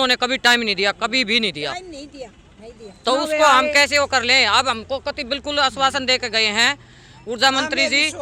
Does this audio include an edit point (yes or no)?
no